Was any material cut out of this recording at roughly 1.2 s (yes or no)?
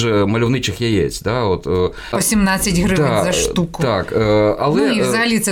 no